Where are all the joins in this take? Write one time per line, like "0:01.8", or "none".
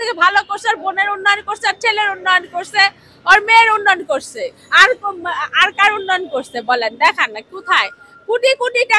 none